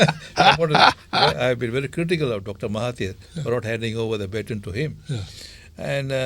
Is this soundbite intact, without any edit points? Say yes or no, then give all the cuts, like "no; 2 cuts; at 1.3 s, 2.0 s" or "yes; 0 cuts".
yes; 0 cuts